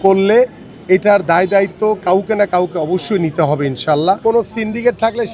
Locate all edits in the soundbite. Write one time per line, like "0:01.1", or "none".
0:04.2